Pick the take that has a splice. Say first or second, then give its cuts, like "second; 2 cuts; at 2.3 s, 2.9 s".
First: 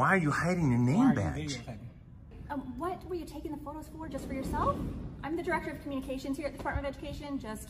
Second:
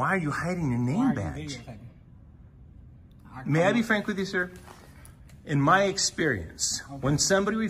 first; 1 cut; at 2.4 s